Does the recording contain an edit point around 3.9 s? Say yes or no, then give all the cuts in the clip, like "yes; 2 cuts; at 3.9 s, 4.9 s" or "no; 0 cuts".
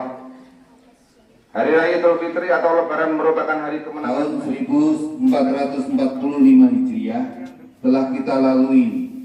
yes; 1 cut; at 3.9 s